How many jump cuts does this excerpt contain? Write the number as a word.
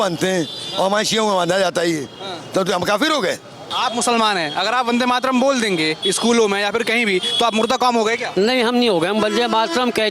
one